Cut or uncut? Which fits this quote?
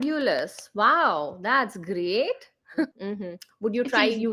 cut